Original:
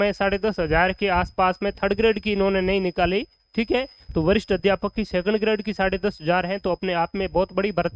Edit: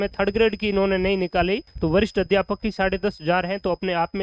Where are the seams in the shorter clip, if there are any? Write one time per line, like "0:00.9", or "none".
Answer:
0:01.7
0:02.7

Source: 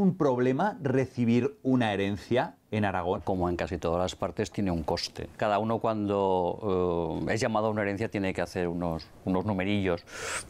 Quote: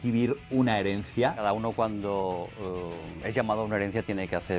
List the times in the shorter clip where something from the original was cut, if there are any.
0:01.4

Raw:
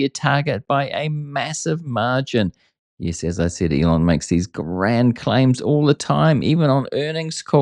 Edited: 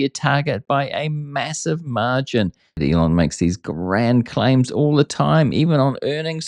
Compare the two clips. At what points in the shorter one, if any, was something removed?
0:02.8

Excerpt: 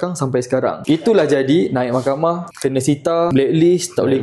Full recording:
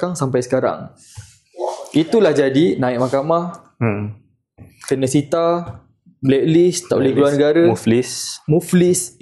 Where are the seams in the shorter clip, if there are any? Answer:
0:00.8
0:02.5
0:03.3

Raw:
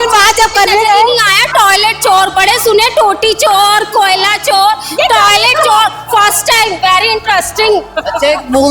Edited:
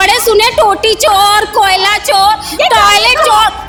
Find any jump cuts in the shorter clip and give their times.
none

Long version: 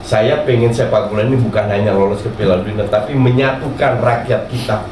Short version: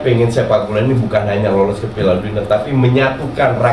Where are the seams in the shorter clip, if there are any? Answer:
none

